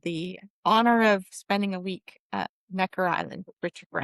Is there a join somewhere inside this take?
yes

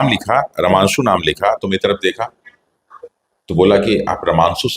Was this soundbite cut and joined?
no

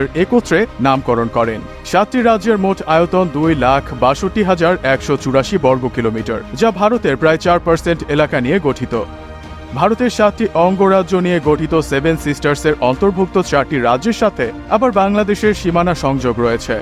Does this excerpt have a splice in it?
no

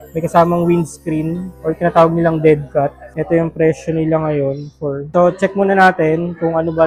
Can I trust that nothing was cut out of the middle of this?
yes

